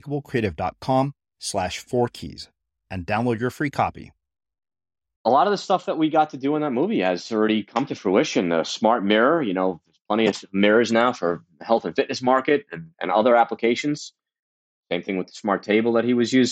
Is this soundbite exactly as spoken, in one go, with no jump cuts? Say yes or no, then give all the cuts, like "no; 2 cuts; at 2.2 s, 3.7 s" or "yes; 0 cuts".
no; 2 cuts; at 5.2 s, 14.6 s